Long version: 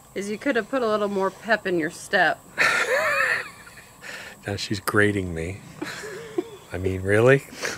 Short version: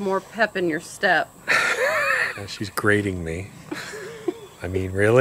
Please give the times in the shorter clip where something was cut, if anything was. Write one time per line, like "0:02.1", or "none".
0:02.4